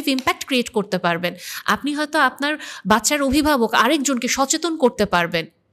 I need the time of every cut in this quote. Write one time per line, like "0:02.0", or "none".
none

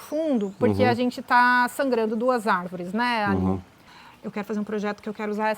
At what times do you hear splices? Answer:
0:03.8

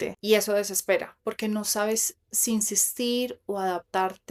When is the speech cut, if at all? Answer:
none

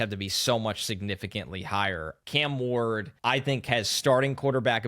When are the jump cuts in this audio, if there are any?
0:02.1
0:03.1

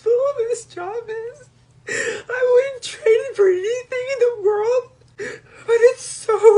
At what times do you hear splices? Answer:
none

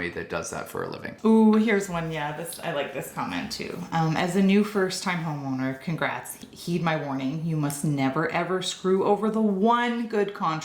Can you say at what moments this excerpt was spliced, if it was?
0:01.0

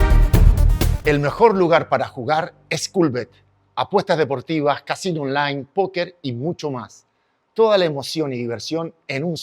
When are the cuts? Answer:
0:01.0

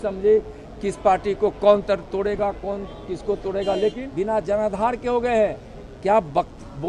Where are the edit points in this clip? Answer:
0:04.0

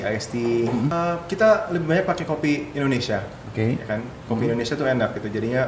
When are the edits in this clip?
0:00.9

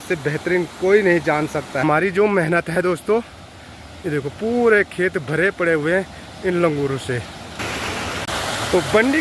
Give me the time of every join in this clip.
0:01.8
0:07.9

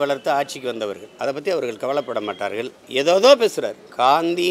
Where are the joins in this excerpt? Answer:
none

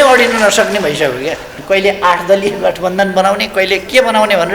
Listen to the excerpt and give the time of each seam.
0:01.6

